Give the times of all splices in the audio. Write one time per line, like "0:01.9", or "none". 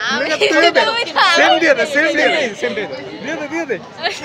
none